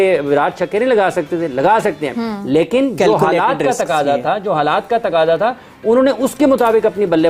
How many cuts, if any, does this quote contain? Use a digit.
0